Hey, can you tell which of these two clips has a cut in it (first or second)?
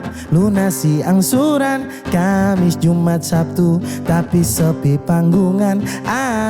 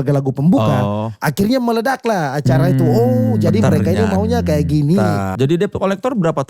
second